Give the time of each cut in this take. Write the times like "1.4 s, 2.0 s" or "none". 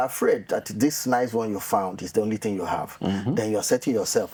none

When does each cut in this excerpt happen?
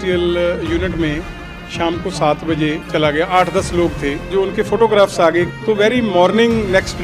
2.8 s, 4.3 s, 5.5 s

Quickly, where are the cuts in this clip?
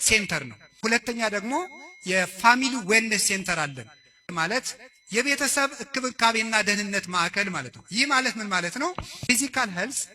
0.8 s, 4.2 s, 9.1 s

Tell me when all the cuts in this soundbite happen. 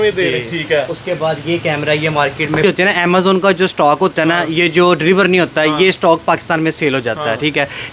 2.6 s

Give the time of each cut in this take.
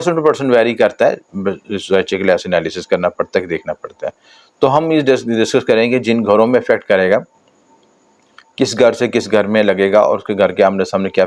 none

